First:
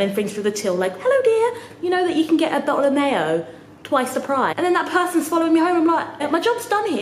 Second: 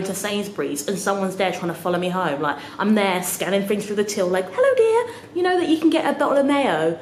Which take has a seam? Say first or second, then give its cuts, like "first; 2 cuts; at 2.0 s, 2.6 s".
first; 2 cuts; at 4.5 s, 6.2 s